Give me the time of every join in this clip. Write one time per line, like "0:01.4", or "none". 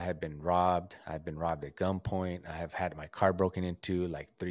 none